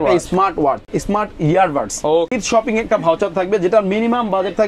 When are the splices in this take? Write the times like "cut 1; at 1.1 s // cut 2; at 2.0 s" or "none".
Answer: cut 1; at 0.9 s // cut 2; at 2.3 s